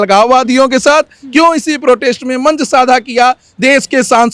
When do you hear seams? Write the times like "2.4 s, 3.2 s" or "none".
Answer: none